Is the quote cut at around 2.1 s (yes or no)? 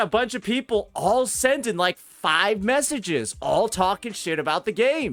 no